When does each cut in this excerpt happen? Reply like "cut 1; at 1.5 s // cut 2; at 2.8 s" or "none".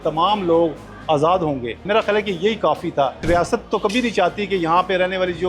cut 1; at 1.8 s // cut 2; at 3.2 s